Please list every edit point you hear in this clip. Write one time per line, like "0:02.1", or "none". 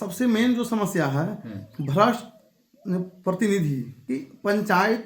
0:03.9